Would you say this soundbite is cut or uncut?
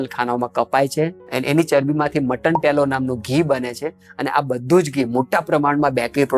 uncut